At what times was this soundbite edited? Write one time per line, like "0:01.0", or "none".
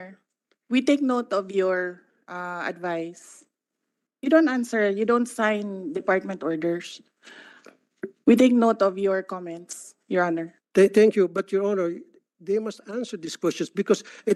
none